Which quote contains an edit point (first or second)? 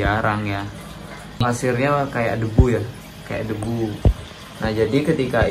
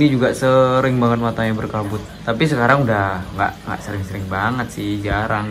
first